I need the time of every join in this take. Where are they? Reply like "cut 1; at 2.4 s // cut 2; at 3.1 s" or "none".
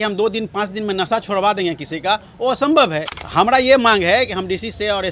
cut 1; at 3.2 s